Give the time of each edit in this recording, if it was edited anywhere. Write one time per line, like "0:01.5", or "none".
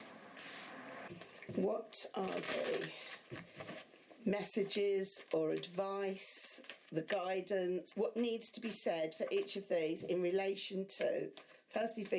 0:01.0
0:07.9